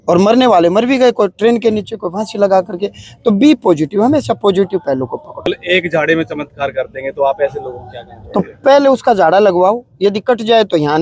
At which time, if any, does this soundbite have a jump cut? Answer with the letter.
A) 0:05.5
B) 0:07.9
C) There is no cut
A